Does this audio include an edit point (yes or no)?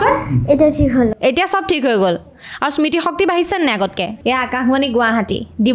yes